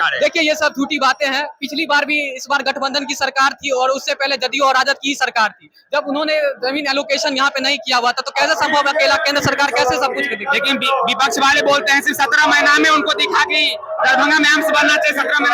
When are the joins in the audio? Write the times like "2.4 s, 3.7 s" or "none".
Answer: none